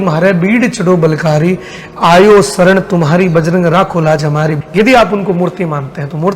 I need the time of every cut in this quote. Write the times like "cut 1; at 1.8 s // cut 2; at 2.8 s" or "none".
cut 1; at 4.6 s

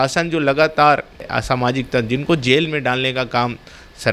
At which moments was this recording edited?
cut 1; at 1.3 s

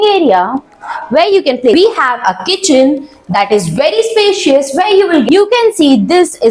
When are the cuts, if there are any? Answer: cut 1; at 1.7 s // cut 2; at 5.2 s

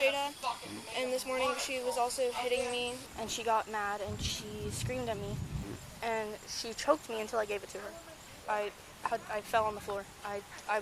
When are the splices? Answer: cut 1; at 3.0 s // cut 2; at 5.6 s // cut 3; at 8.3 s

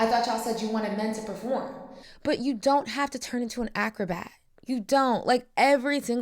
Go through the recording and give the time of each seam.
none

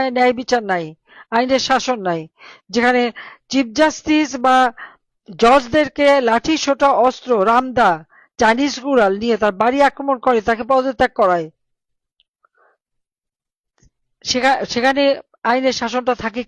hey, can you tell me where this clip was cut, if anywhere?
none

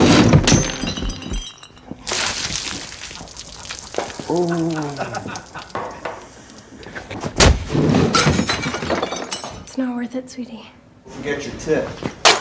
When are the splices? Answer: cut 1; at 11.1 s

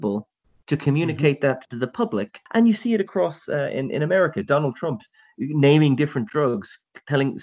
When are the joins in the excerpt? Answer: cut 1; at 2.4 s

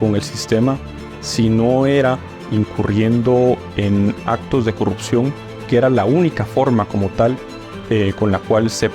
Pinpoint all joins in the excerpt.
none

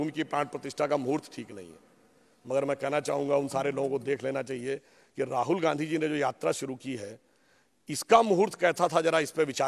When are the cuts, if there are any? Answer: none

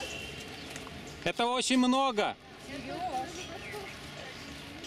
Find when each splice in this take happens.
none

